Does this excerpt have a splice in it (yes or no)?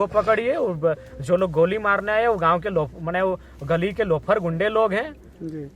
no